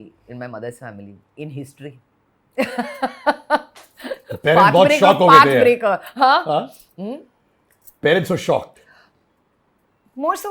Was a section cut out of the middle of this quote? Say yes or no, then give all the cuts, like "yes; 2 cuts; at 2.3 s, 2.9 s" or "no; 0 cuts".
no; 0 cuts